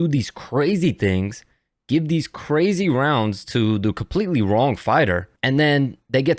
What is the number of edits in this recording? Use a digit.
1